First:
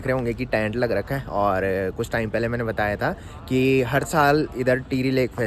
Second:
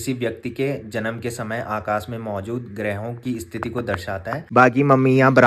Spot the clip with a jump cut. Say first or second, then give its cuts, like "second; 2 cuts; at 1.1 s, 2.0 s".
second; 1 cut; at 4.5 s